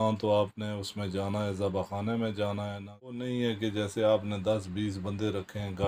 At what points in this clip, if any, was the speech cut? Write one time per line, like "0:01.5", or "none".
0:03.2